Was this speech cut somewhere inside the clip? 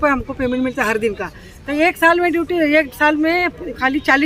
no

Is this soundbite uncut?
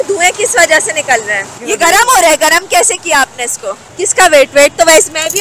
no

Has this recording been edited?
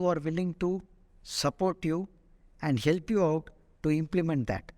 no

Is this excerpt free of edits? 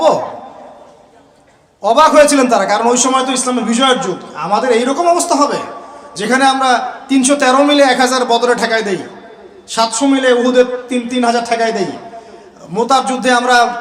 yes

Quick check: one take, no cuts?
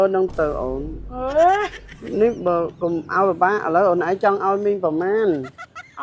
no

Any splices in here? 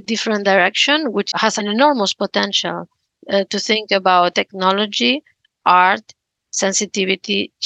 yes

